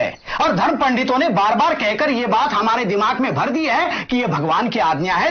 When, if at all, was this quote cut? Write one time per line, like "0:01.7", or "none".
none